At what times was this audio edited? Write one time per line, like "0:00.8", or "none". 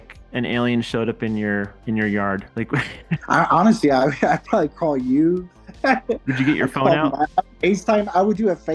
0:03.1